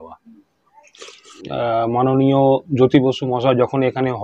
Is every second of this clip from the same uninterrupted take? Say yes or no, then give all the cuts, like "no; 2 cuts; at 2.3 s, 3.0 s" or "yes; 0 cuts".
no; 1 cut; at 1.5 s